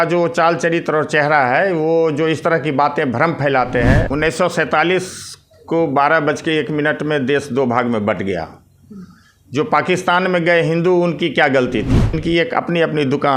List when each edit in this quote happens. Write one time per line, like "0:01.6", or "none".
0:04.1
0:12.2

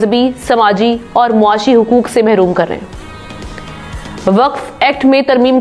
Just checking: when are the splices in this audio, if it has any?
none

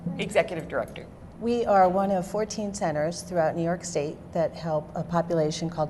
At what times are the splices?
none

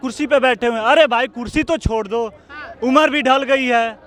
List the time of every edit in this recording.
none

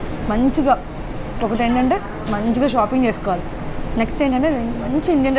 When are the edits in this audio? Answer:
none

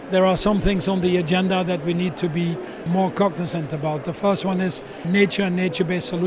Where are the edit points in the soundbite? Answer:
0:02.9
0:05.1

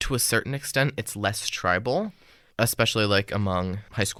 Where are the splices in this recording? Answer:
none

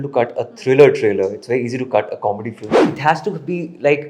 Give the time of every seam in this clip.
0:02.8

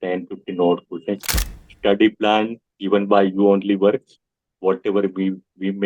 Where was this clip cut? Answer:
0:01.3

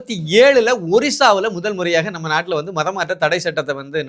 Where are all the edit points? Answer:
none

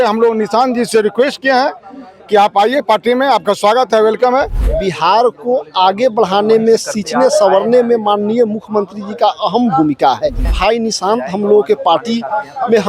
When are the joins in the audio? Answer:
0:04.6
0:10.5

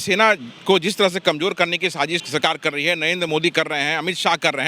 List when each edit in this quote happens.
0:02.2

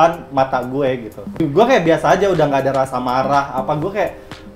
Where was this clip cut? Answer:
0:01.4

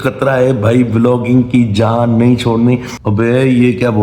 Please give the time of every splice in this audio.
0:02.9

